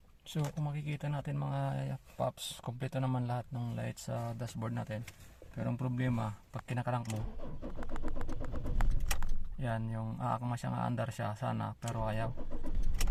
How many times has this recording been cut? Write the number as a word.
zero